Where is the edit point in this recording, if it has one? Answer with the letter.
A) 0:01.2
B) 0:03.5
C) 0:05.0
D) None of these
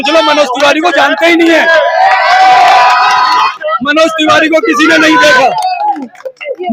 B